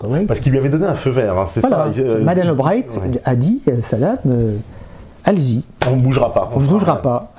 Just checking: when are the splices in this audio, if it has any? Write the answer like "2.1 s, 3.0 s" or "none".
none